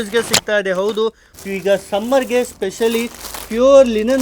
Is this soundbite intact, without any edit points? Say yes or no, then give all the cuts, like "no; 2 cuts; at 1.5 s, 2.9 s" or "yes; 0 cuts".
no; 1 cut; at 1.3 s